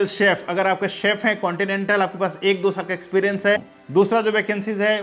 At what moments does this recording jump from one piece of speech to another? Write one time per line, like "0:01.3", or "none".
0:03.7

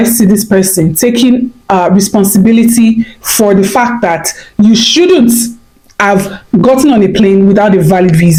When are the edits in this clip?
none

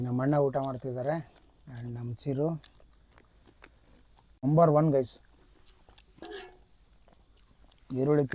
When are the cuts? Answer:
0:04.4

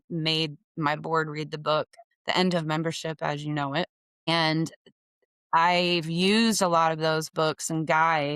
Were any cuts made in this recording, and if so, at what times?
0:02.1
0:04.3

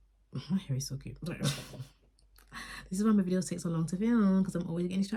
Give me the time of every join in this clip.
none

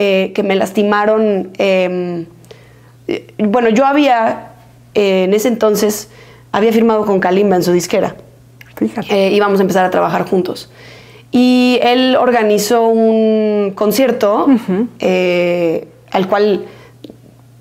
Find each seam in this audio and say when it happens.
none

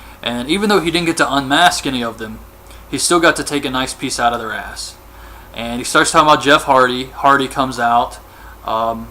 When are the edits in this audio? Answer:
0:01.5

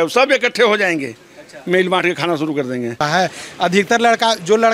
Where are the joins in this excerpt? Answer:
0:03.0

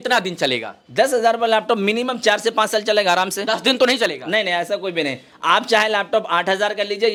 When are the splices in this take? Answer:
none

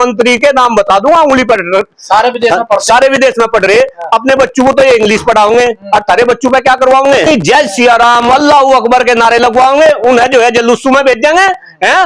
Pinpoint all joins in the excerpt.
none

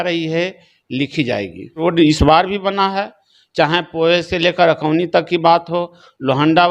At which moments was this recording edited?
0:01.8

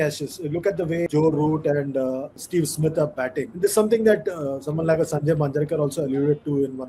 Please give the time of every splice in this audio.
0:01.1
0:02.3
0:03.5

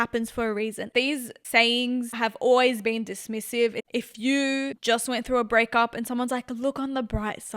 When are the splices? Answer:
0:00.8
0:03.8
0:04.8

